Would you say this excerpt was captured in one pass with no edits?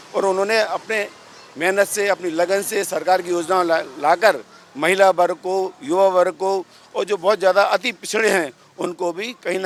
yes; 0 cuts

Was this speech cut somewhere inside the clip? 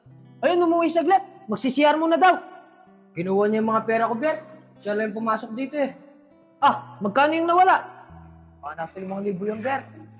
no; 0 cuts

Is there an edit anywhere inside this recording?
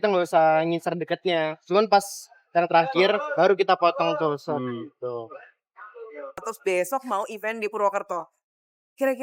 yes; 1 cut; at 6.5 s

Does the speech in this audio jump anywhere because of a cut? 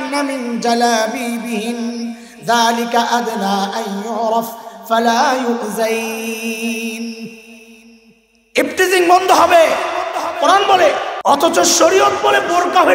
yes; 1 cut; at 11.1 s

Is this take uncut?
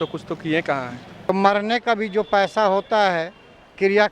no; 1 cut; at 1.3 s

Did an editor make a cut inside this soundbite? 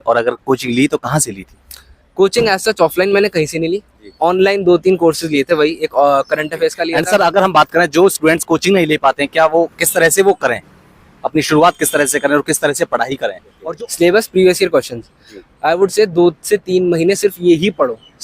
yes; 2 cuts; at 6.9 s, 13.5 s

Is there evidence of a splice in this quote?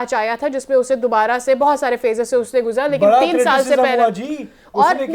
no; 0 cuts

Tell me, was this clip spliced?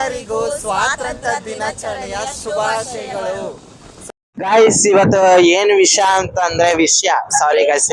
yes; 1 cut; at 4.0 s

